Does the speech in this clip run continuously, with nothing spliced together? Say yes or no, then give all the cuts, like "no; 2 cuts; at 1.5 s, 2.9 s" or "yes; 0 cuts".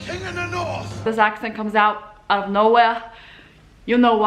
no; 1 cut; at 1.0 s